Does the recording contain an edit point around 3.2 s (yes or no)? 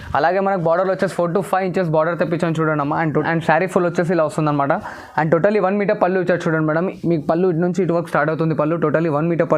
yes